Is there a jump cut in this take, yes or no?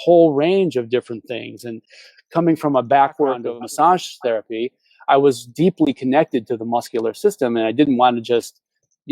yes